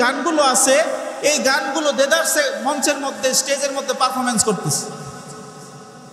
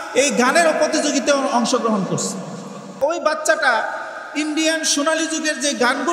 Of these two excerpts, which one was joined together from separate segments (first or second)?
second